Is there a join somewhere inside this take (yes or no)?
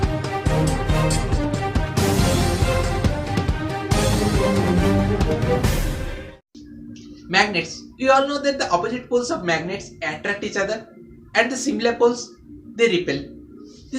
no